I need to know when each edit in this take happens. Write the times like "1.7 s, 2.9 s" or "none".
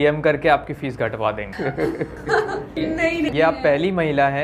3.3 s